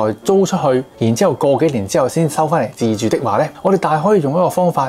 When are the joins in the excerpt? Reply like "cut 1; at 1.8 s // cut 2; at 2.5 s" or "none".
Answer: cut 1; at 0.9 s // cut 2; at 3.5 s